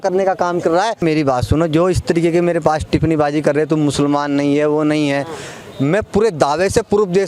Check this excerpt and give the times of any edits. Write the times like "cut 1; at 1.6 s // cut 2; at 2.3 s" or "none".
cut 1; at 1.0 s